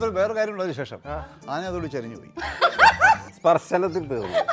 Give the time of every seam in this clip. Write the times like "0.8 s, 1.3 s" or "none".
3.3 s